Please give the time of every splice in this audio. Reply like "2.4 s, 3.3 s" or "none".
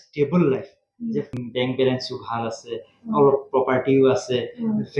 1.4 s